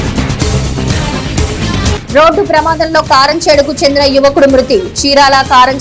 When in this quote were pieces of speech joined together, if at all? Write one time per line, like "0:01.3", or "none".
0:01.2